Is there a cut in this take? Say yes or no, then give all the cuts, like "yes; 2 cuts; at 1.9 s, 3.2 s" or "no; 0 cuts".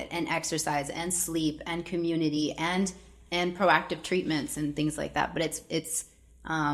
no; 0 cuts